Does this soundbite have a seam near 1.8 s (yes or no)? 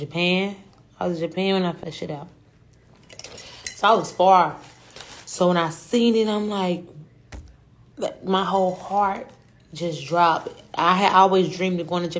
yes